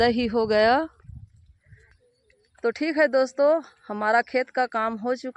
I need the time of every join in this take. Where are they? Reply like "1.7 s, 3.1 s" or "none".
2.0 s